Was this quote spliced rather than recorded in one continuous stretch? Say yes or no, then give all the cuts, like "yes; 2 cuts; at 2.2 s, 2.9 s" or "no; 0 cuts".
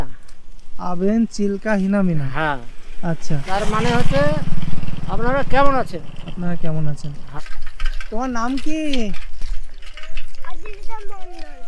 yes; 1 cut; at 7.2 s